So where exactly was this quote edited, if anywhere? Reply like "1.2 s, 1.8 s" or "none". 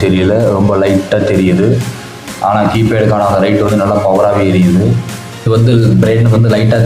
5.4 s